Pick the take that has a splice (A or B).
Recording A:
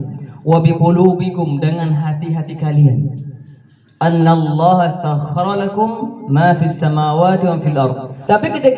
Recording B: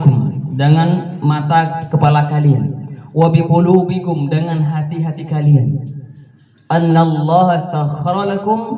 A